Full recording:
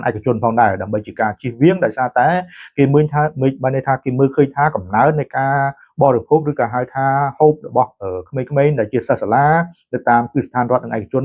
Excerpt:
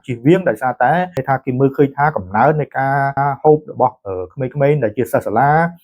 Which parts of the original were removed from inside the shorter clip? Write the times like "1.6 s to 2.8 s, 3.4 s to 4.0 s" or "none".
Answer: 2.5 s to 3.8 s, 5.8 s to 7.1 s